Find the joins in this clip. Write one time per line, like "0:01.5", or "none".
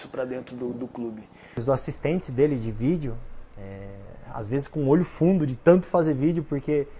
0:01.6